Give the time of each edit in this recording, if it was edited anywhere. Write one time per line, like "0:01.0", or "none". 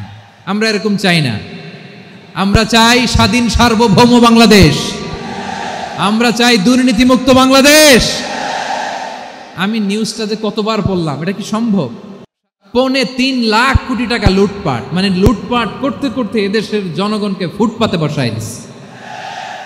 0:12.5